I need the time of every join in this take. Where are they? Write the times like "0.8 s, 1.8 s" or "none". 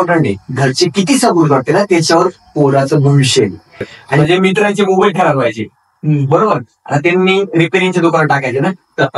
4.2 s

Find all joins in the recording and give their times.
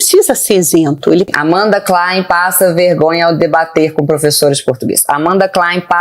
1.3 s

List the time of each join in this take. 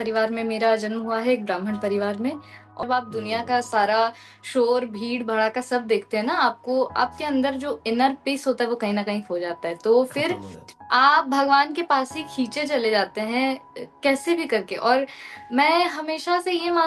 2.8 s

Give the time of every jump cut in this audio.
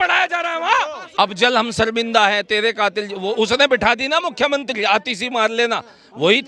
1.0 s

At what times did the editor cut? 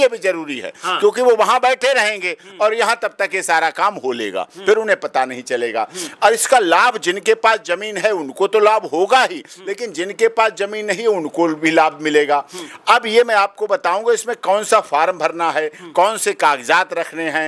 none

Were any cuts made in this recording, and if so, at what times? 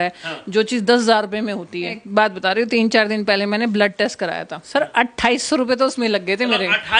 2.0 s, 4.6 s

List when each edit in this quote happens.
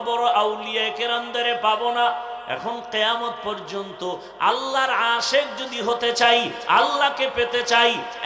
none

